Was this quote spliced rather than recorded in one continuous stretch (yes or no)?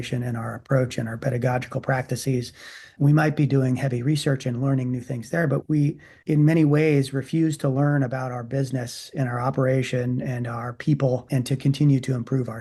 no